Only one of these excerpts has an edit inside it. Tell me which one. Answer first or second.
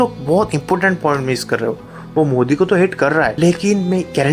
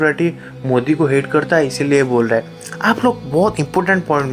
first